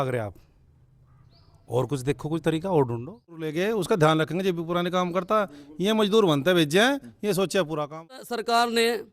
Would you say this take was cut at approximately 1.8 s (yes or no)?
no